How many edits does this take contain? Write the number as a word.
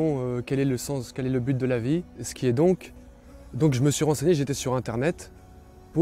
one